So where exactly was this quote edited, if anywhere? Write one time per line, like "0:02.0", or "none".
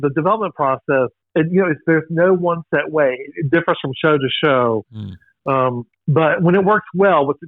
0:01.2
0:05.9